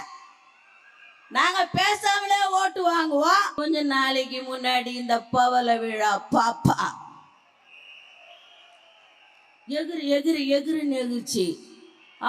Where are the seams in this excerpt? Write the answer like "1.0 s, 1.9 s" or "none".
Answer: 3.5 s